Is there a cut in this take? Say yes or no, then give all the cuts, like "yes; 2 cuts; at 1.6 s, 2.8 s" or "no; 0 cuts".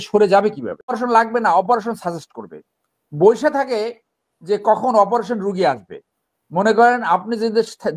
yes; 1 cut; at 1.0 s